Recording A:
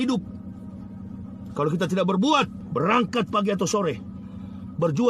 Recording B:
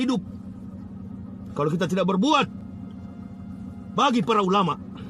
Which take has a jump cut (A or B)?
A